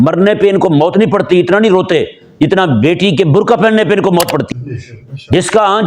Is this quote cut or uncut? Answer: cut